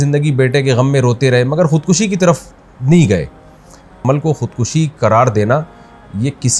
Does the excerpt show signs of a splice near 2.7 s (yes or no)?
no